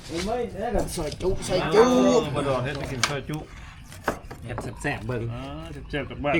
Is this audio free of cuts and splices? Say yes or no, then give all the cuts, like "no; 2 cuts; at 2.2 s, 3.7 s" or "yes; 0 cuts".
yes; 0 cuts